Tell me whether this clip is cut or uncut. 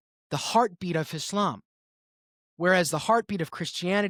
uncut